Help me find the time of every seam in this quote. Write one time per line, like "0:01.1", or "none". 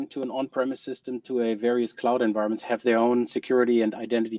none